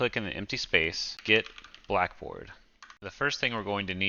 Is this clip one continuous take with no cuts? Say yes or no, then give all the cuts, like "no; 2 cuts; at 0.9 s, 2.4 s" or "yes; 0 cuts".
no; 2 cuts; at 1.1 s, 3.0 s